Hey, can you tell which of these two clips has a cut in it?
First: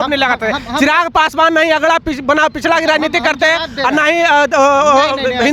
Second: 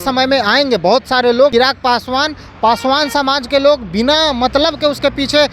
second; 1 cut; at 1.5 s

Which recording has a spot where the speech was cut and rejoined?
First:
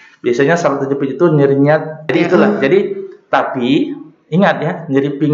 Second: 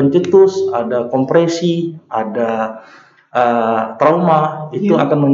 first; 1 cut; at 2.1 s

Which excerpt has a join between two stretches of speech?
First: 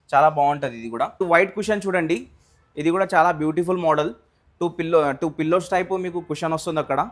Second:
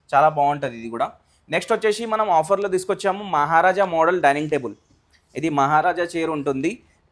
first; 1 cut; at 1.1 s

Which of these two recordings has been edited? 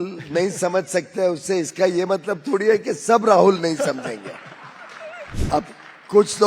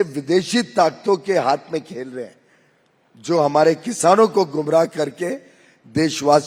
first; 1 cut; at 5.4 s

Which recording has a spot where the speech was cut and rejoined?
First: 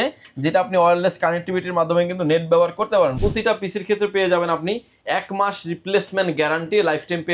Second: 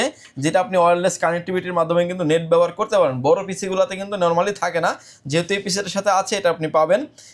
first; 1 cut; at 3.2 s

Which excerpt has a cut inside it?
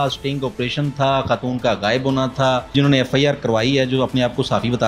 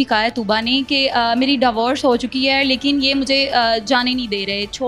first; 1 cut; at 2.7 s

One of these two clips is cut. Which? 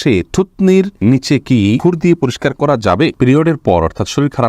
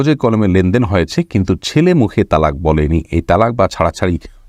first; 3 cuts; at 0.9 s, 1.8 s, 3.1 s

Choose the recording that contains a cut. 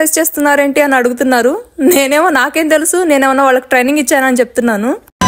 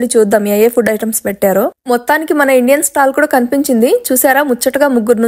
second; 1 cut; at 1.8 s

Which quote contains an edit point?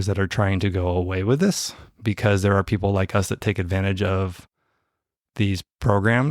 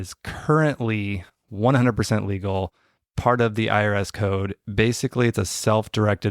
second; 1 cut; at 4.6 s

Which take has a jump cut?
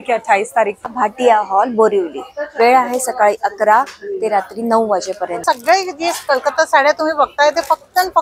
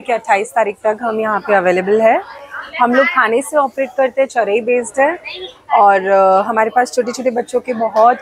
first; 2 cuts; at 0.8 s, 5.4 s

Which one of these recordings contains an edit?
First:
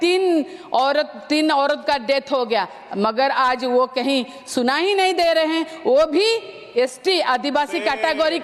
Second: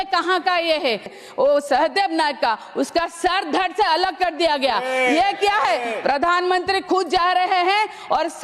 second; 1 cut; at 1.2 s

